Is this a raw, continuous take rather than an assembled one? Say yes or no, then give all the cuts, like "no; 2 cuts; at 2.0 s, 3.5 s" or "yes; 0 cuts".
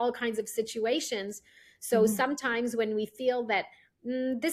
yes; 0 cuts